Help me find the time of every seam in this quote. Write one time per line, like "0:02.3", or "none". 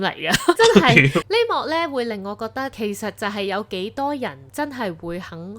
0:01.2